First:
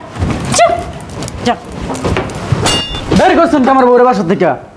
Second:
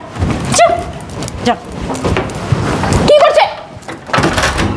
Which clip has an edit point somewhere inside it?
first; 1 cut; at 2.8 s

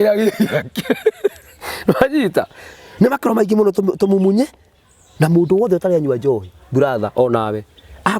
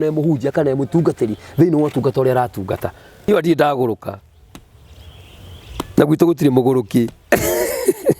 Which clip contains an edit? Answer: second; 1 cut; at 3.3 s

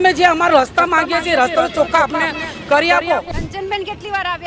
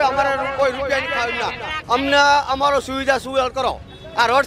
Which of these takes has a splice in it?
first; 1 cut; at 3.4 s

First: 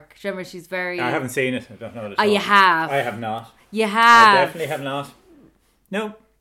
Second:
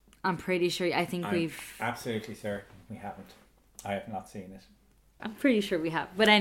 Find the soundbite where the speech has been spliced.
second; 1 cut; at 5.3 s

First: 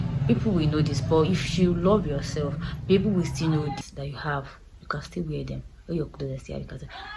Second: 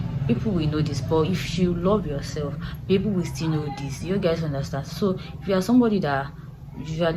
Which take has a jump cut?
first; 1 cut; at 3.8 s

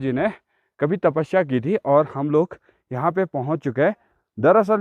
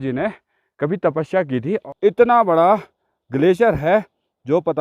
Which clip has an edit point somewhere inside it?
second; 1 cut; at 1.8 s

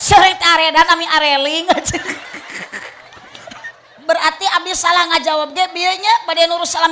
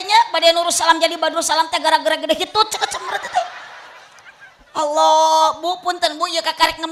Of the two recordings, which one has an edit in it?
first; 1 cut; at 3.6 s

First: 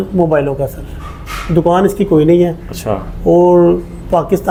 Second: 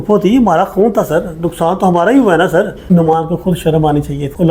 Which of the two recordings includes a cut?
second; 1 cut; at 2.8 s

